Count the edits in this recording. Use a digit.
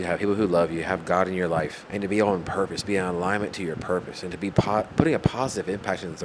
1